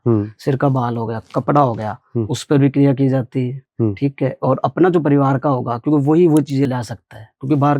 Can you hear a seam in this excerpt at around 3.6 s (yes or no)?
no